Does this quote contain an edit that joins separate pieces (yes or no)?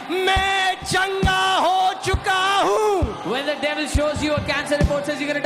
no